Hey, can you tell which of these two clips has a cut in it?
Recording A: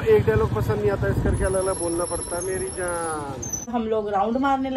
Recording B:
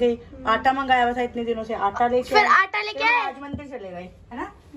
A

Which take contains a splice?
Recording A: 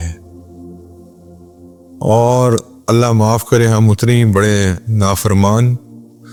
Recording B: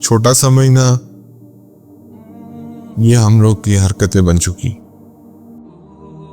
B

